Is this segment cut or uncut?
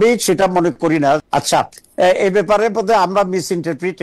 uncut